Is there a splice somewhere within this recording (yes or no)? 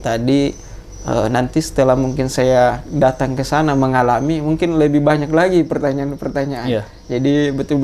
no